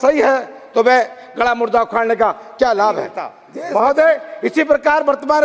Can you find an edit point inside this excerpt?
yes; 1 cut; at 3.5 s

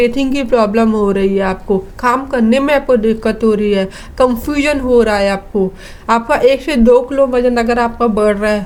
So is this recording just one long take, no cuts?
yes; 0 cuts

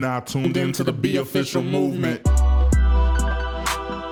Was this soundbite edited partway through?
no; 0 cuts

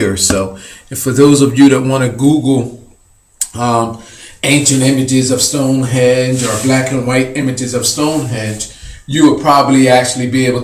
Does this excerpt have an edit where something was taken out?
no; 0 cuts

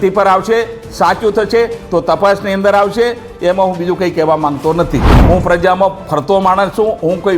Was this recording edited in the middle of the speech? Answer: yes; 1 cut; at 5.1 s

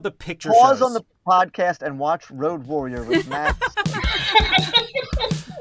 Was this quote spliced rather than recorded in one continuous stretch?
no; 0 cuts

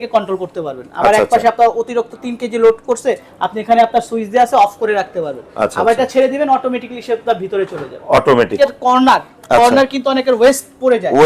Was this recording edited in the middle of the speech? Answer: yes; 1 cut; at 8.5 s

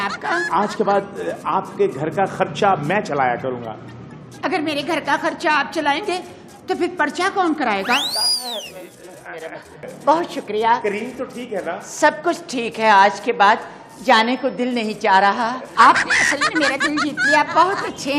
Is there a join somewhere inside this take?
no; 0 cuts

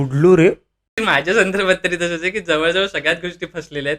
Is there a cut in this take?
yes; 1 cut; at 1.0 s

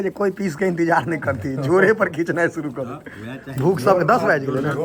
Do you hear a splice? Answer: no; 0 cuts

